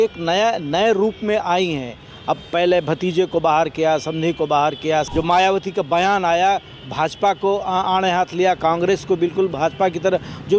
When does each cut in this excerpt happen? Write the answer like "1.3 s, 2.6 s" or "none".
5.1 s